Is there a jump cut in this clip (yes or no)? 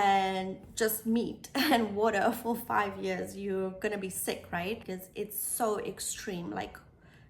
yes